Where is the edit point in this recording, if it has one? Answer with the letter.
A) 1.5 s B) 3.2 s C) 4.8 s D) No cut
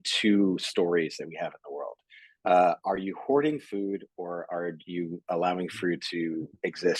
D